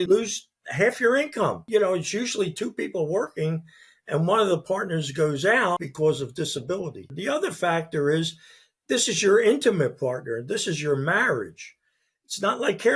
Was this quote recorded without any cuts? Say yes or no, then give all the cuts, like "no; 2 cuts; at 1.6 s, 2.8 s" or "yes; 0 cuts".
no; 3 cuts; at 1.6 s, 5.9 s, 7.1 s